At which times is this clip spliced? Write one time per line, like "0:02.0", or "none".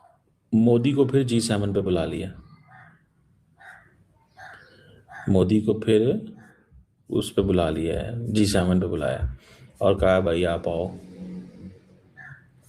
none